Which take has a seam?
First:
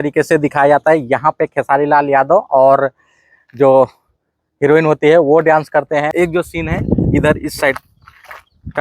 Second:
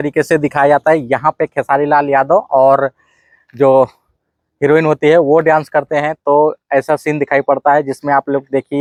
first; 1 cut; at 6.1 s

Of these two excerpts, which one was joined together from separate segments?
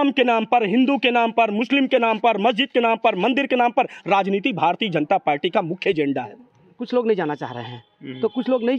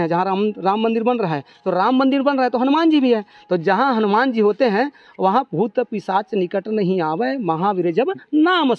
first; 1 cut; at 6.4 s

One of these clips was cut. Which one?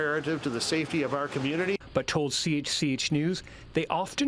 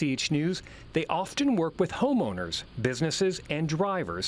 first; 1 cut; at 1.8 s

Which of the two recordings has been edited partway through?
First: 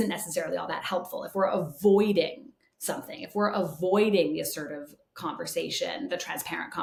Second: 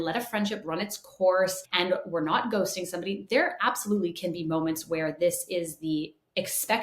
second; 1 cut; at 1.6 s

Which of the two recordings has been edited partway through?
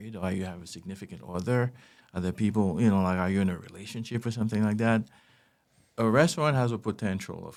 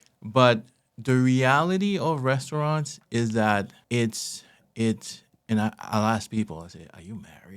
second; 1 cut; at 3.8 s

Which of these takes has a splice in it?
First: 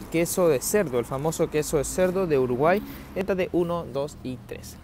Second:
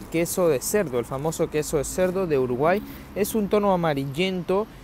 first; 1 cut; at 3.2 s

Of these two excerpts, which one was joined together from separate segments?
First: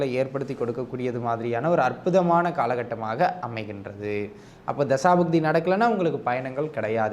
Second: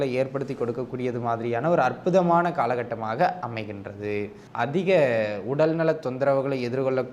second; 1 cut; at 4.4 s

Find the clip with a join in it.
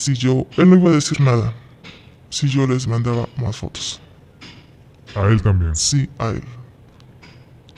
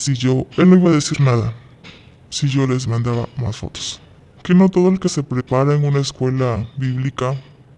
second; 1 cut; at 4.3 s

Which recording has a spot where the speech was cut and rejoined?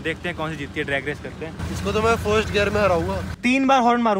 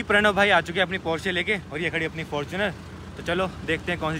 first; 2 cuts; at 1.6 s, 3.3 s

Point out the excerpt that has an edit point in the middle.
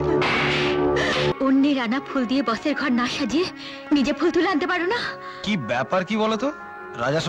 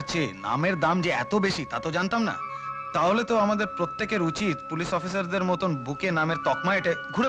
first; 1 cut; at 1.3 s

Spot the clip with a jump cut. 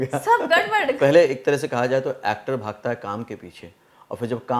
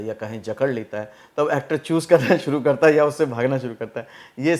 first; 1 cut; at 1.0 s

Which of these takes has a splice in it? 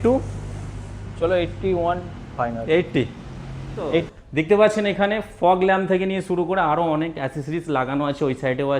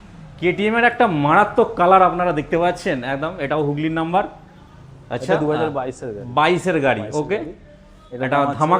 first; 1 cut; at 4.1 s

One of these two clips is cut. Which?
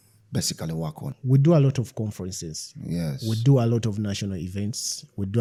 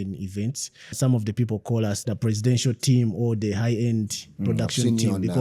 second; 2 cuts; at 0.9 s, 2.0 s

